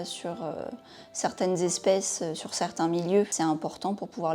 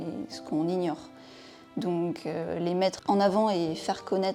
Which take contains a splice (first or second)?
first